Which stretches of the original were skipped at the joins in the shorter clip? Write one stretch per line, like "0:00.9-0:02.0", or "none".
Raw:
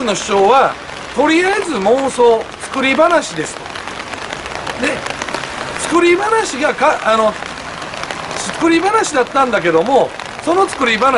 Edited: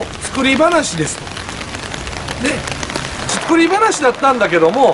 0:05.7-0:08.4